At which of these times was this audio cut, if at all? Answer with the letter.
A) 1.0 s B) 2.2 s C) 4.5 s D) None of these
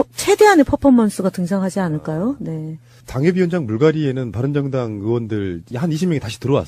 C